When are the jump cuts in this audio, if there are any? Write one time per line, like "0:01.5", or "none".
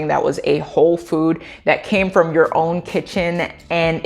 none